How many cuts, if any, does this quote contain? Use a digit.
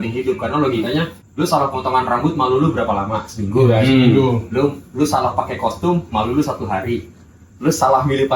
1